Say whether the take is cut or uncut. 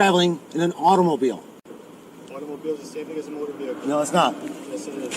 cut